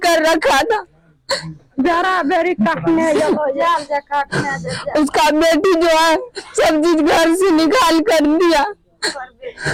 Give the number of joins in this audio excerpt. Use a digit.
0